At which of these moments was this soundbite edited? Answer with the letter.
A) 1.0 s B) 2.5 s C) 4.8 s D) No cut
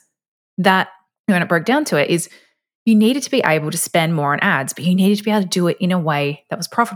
A